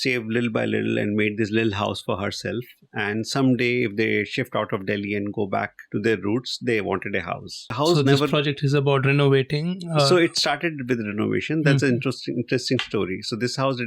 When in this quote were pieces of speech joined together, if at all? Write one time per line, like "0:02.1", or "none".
0:05.8
0:07.7